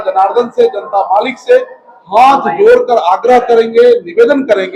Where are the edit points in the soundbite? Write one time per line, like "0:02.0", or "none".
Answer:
none